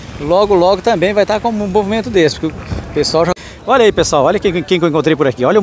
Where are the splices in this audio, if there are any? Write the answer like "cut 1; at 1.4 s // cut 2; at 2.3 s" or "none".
cut 1; at 3.4 s